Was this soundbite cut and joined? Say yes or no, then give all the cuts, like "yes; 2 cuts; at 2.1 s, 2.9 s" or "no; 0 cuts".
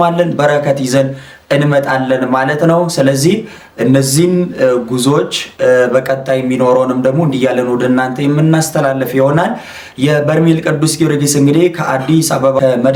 no; 0 cuts